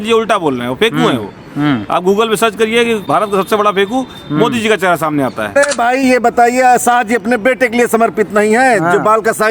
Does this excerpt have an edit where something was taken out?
yes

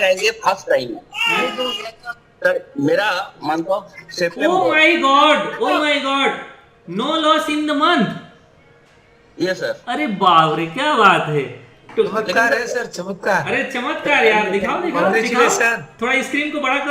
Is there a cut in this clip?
no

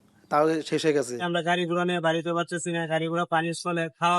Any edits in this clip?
yes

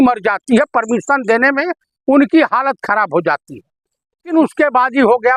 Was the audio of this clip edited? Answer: yes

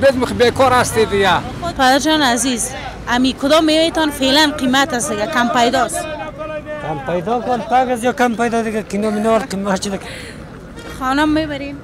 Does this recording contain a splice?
yes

